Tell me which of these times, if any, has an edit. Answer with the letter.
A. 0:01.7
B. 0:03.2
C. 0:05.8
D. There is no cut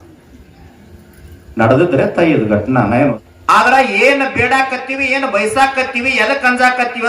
B